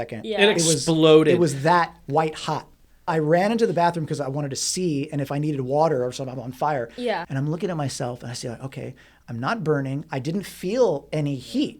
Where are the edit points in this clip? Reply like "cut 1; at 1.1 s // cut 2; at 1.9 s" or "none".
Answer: cut 1; at 3.0 s